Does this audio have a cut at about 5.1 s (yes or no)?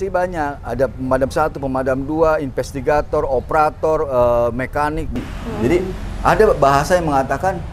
yes